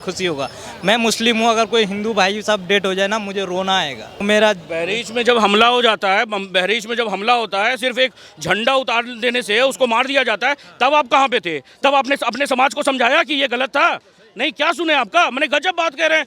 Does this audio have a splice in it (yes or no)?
yes